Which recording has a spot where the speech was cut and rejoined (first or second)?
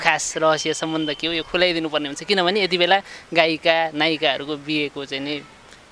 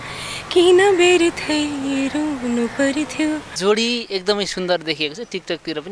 second